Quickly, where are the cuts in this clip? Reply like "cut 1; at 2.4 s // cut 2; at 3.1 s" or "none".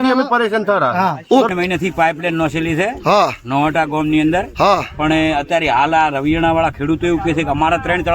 cut 1; at 1.5 s